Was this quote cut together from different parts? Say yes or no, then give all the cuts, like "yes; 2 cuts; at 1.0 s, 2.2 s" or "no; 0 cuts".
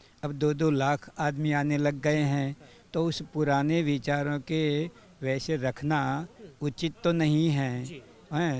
no; 0 cuts